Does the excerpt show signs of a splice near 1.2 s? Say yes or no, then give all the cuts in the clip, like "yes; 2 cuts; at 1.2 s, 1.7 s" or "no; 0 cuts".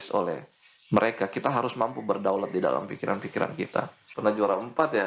no; 1 cut; at 4.0 s